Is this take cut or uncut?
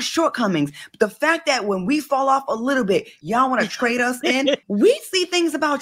cut